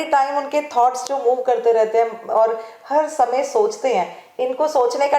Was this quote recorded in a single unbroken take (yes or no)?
yes